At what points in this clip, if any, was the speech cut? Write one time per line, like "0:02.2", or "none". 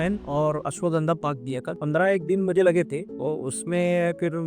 0:01.7
0:03.1

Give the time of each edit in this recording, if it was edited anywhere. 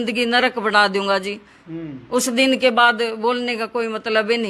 none

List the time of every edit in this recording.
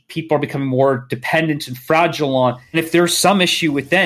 0:02.6

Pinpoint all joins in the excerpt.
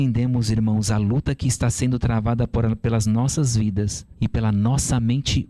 0:04.0

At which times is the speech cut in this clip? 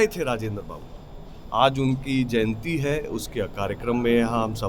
none

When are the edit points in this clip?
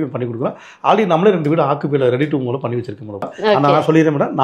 0:03.2

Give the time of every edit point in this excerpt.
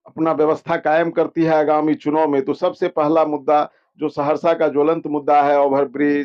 none

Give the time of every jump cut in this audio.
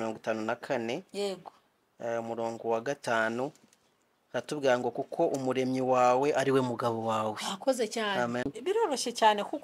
0:08.5

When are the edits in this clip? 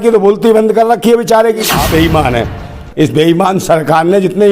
0:01.8

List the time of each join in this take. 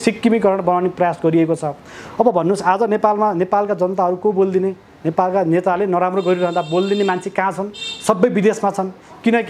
none

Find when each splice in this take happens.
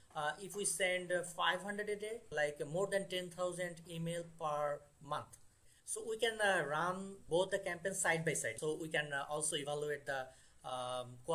0:02.3
0:05.5
0:07.2
0:08.5

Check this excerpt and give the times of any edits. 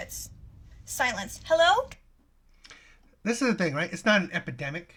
none

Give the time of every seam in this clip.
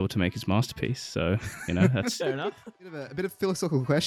0:03.0

